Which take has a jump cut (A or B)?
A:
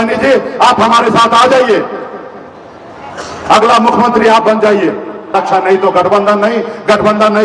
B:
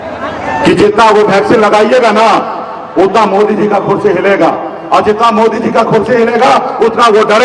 A